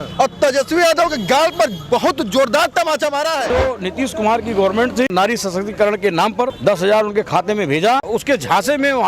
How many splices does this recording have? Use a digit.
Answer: 4